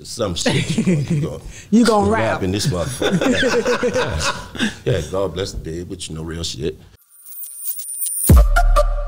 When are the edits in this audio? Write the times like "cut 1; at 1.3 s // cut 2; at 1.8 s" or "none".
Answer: cut 1; at 6.9 s